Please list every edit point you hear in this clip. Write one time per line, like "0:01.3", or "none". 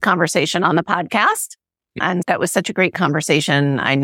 0:02.2